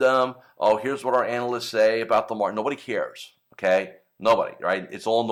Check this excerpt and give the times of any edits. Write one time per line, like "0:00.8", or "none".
none